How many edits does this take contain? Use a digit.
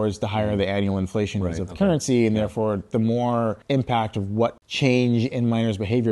2